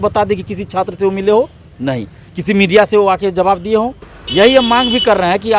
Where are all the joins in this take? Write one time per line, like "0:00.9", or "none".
0:04.1

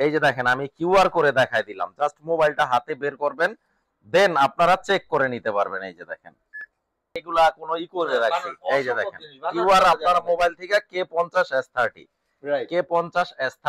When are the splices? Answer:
0:07.2

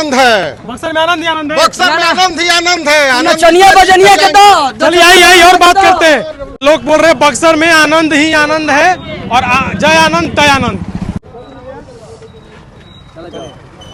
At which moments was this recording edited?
none

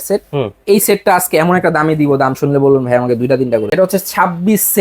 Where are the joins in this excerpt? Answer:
0:03.7

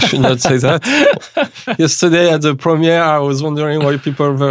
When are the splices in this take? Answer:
none

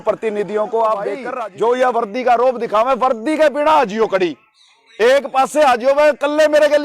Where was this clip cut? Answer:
0:01.3

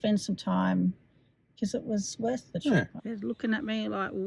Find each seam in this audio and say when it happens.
0:02.9

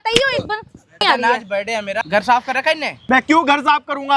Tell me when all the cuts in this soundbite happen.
0:01.0
0:02.0
0:02.9

